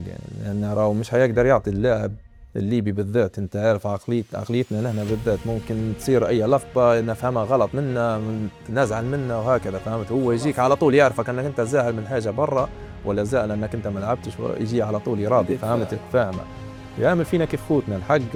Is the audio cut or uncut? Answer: uncut